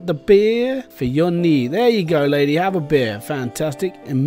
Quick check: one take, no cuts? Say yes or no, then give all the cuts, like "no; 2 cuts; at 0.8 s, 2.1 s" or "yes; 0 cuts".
no; 1 cut; at 0.9 s